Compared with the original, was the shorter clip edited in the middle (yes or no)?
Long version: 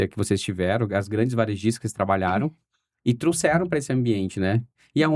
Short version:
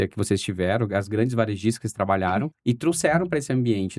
yes